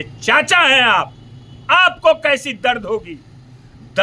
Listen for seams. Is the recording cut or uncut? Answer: uncut